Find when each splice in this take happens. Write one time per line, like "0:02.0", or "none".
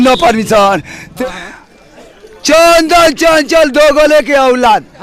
0:01.2